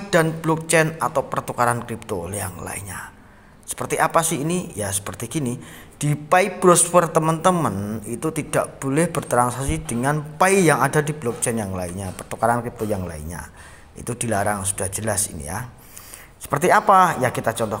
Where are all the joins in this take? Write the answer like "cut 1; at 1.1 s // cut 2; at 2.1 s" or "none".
none